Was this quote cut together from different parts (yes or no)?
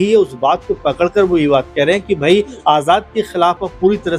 no